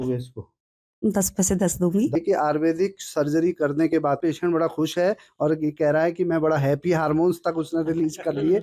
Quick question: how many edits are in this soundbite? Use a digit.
2